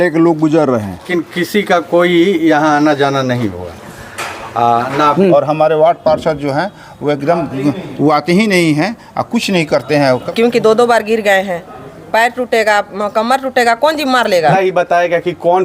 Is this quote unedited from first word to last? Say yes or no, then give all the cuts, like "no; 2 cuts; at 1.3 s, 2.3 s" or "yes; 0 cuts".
no; 4 cuts; at 1.1 s, 5.1 s, 10.3 s, 14.5 s